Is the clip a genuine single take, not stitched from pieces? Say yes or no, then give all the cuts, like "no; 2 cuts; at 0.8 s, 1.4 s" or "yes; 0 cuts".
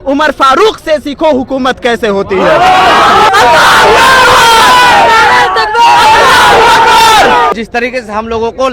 no; 2 cuts; at 3.3 s, 7.5 s